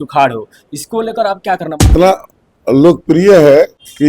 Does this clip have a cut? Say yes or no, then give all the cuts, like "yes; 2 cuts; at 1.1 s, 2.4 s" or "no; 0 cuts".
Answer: yes; 1 cut; at 1.9 s